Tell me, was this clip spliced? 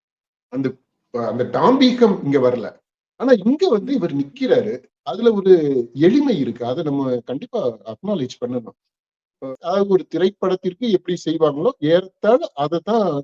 yes; 1 cut; at 9.4 s

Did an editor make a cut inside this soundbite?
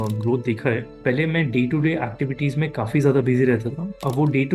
yes; 1 cut; at 0.9 s

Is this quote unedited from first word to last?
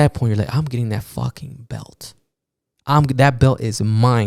yes; 0 cuts

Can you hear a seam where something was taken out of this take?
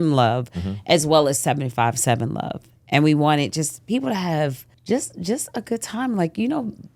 yes; 1 cut; at 4.7 s

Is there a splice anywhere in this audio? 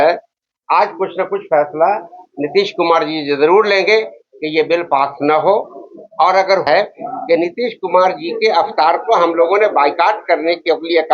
yes; 1 cut; at 6.7 s

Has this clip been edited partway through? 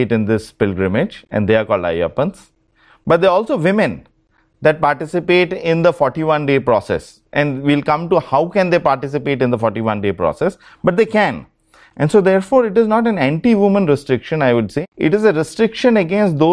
no; 0 cuts

